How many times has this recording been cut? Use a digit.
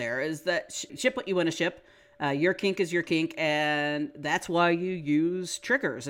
1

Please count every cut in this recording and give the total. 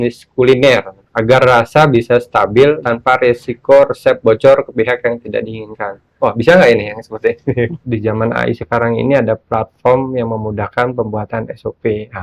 3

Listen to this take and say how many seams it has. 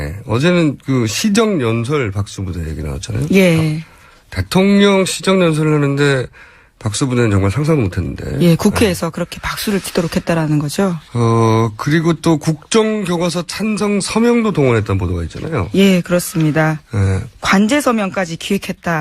1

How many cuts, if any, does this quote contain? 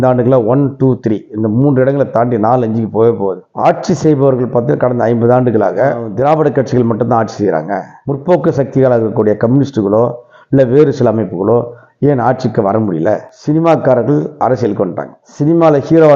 2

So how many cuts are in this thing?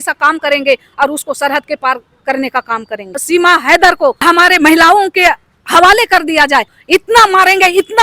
3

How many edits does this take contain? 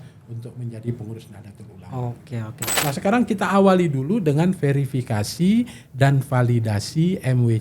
1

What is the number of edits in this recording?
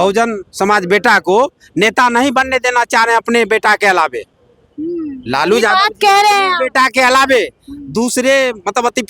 0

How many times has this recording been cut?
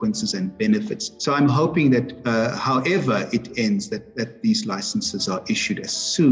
0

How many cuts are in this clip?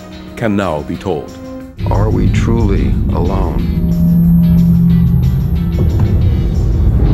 1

